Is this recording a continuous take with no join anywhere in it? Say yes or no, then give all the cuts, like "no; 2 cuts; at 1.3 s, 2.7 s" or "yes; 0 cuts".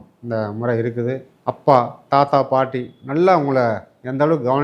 no; 1 cut; at 1.3 s